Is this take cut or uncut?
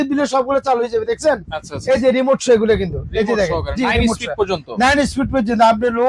uncut